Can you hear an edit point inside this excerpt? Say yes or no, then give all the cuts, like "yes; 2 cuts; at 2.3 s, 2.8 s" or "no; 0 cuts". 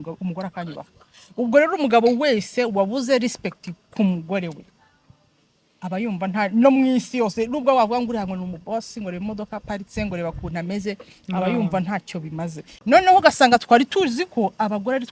yes; 1 cut; at 12.6 s